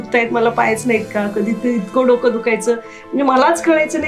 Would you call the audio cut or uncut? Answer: uncut